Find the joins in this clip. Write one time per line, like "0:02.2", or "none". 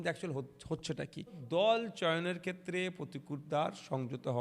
0:01.4